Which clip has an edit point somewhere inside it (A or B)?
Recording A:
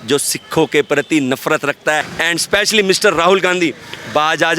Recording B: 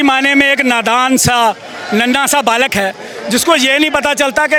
A